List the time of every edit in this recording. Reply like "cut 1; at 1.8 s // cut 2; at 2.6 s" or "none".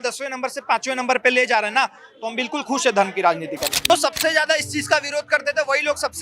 cut 1; at 3.9 s